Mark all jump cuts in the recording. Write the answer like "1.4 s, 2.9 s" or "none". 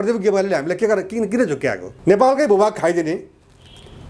1.9 s